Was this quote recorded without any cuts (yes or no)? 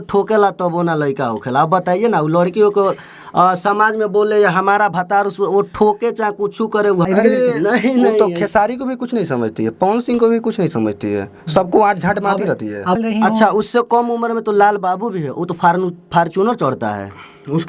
no